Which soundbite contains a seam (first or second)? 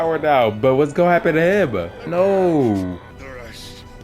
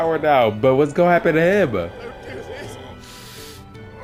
first